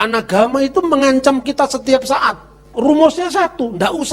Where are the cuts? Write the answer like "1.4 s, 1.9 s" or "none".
2.7 s